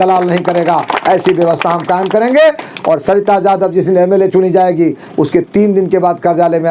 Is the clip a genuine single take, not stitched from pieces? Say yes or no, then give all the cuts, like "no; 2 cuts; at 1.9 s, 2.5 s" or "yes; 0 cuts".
yes; 0 cuts